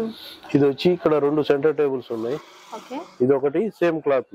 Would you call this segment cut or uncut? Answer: uncut